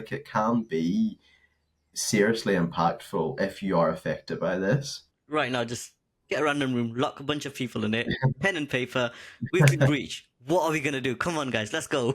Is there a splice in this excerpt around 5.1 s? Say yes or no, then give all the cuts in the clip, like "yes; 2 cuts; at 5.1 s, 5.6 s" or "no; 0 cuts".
yes; 1 cut; at 5.1 s